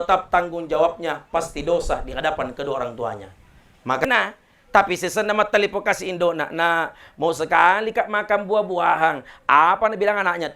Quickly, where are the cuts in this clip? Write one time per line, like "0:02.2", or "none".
0:04.0